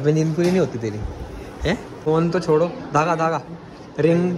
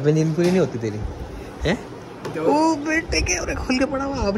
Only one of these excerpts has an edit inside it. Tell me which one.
first; 1 cut; at 2.0 s

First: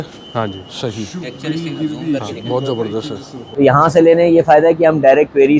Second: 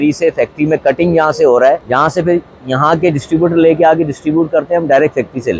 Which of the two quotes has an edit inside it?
first; 1 cut; at 3.5 s

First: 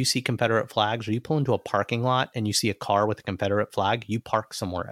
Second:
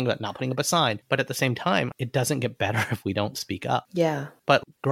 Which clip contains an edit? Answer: second; 2 cuts; at 1.0 s, 4.0 s

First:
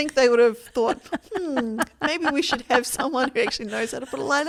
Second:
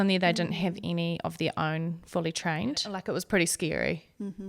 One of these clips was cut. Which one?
second; 1 cut; at 3.0 s

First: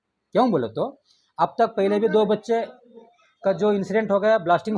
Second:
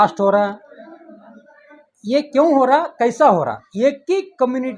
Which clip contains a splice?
second; 1 cut; at 3.6 s

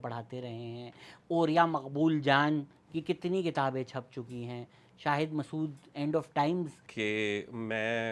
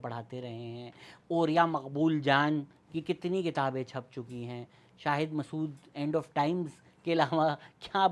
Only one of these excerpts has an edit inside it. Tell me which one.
first; 1 cut; at 6.8 s

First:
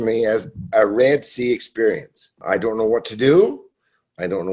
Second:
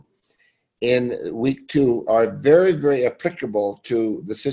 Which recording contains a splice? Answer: first; 1 cut; at 2.4 s

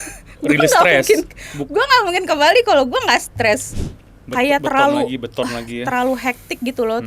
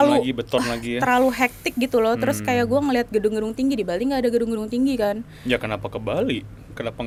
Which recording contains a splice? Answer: first; 1 cut; at 3.7 s

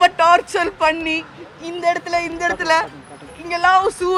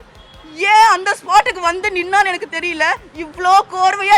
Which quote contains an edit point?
second; 1 cut; at 3.1 s

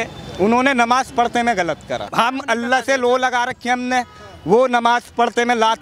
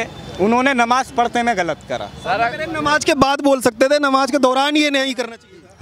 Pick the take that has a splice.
first; 1 cut; at 2.1 s

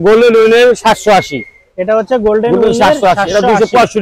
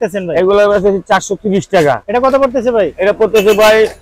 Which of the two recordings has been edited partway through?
second; 1 cut; at 2.0 s

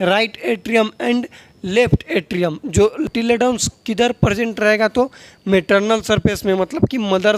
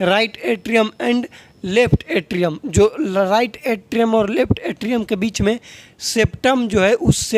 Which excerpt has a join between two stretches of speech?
first; 1 cut; at 3.1 s

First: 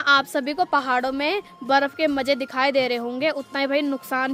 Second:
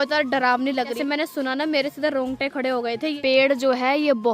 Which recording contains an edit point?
second; 2 cuts; at 1.0 s, 3.2 s

